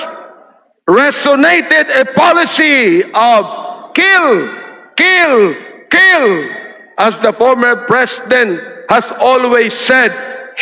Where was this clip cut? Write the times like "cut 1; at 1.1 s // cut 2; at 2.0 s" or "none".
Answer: none

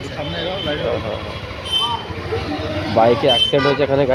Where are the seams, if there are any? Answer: none

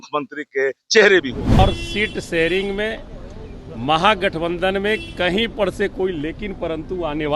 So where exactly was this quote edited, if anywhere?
cut 1; at 1.6 s

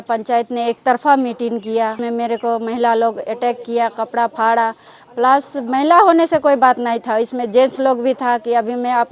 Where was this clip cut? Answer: cut 1; at 2.0 s

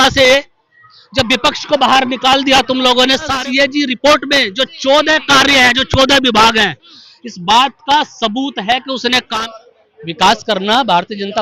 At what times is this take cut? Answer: cut 1; at 3.3 s // cut 2; at 9.3 s

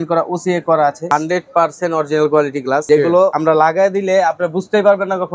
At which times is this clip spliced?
cut 1; at 1.1 s // cut 2; at 3.1 s

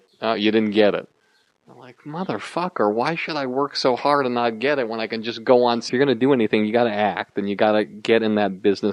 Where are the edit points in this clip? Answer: none

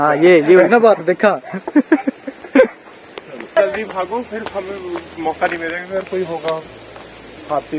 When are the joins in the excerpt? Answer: cut 1; at 3.6 s

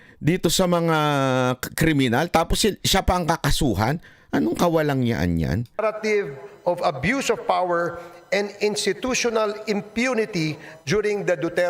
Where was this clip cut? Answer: cut 1; at 5.8 s

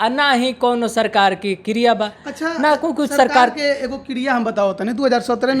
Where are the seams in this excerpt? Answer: none

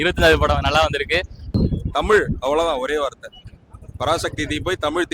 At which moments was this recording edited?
cut 1; at 1.4 s

